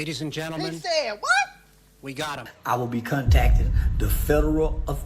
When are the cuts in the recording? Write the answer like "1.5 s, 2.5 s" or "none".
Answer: 2.5 s